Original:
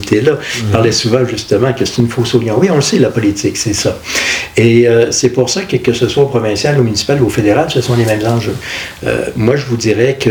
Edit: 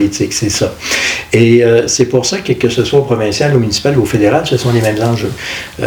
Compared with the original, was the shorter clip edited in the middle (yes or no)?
no